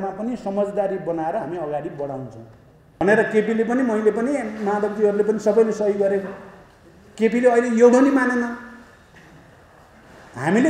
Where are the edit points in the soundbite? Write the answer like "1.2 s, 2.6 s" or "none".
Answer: 3.0 s